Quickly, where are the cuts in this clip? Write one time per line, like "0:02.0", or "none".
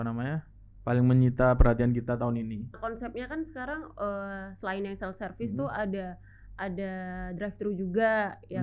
0:02.7